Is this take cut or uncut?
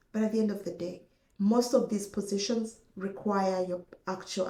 uncut